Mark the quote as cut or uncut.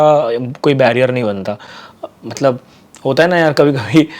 uncut